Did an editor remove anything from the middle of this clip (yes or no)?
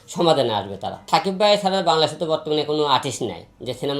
no